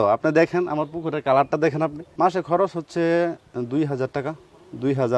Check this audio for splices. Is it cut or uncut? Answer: cut